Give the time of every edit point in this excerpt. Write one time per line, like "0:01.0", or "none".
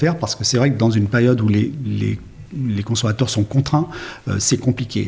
none